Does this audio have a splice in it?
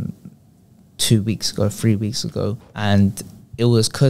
yes; 1 cut; at 2.7 s

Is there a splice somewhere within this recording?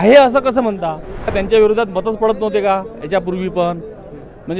yes; 1 cut; at 1.3 s

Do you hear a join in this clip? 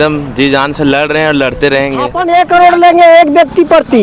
yes; 1 cut; at 2.2 s

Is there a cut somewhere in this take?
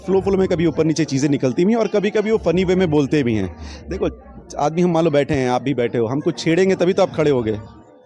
no; 0 cuts

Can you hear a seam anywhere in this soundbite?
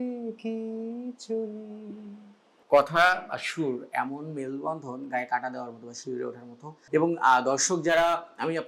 no; 0 cuts

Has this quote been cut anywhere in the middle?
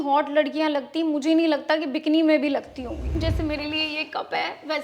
yes; 1 cut; at 3.1 s

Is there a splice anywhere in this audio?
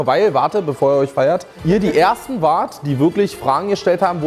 yes; 1 cut; at 1.5 s

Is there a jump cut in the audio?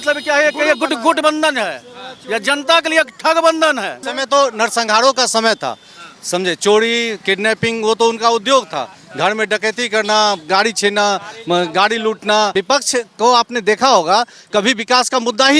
yes; 2 cuts; at 4.1 s, 12.5 s

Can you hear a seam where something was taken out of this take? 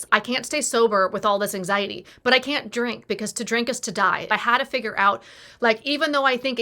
yes; 1 cut; at 4.3 s

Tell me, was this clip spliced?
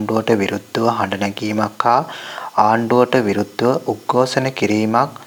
no; 0 cuts

